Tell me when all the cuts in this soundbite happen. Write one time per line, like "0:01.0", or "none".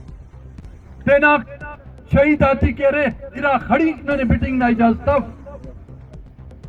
none